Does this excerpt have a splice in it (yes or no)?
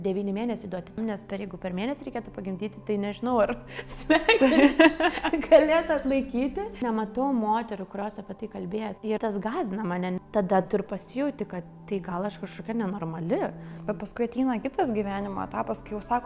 yes